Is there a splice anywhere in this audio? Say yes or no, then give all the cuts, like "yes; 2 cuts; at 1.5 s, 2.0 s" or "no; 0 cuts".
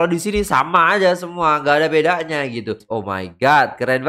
yes; 1 cut; at 2.9 s